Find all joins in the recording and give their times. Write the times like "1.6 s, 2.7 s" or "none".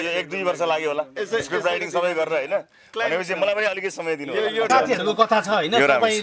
4.7 s